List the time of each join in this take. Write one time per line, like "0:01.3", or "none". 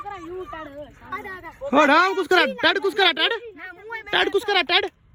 none